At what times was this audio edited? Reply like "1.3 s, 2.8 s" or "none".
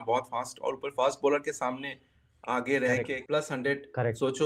3.2 s